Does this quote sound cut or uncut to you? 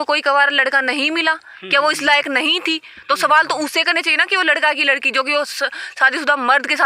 uncut